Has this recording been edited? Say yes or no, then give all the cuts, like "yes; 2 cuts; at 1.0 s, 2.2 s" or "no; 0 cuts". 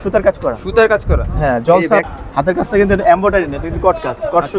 yes; 1 cut; at 2.0 s